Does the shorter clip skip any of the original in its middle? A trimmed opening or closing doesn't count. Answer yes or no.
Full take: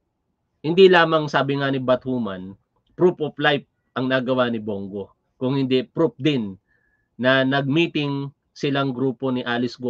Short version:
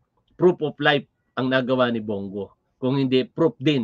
no